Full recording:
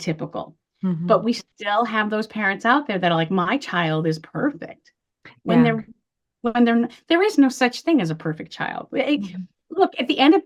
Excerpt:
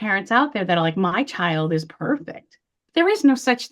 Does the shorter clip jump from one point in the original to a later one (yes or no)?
yes